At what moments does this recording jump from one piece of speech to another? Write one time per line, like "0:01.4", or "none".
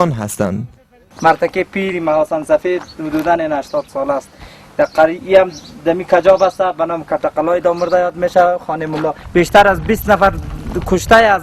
0:07.6